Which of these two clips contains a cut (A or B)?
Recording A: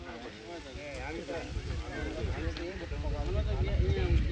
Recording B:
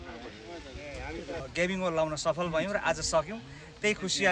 B